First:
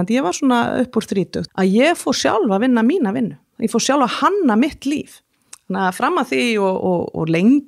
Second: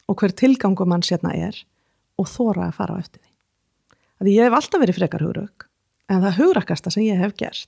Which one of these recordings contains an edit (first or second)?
first